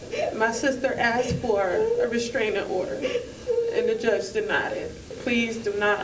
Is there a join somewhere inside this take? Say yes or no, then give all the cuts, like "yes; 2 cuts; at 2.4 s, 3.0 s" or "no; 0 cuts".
no; 0 cuts